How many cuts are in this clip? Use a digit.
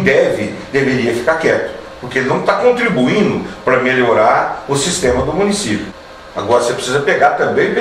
1